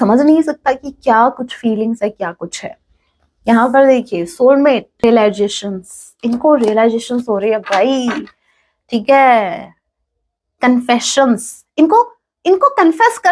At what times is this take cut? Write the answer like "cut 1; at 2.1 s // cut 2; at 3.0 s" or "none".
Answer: cut 1; at 5.0 s